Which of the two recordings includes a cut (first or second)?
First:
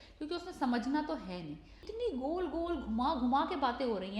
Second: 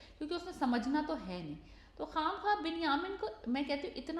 first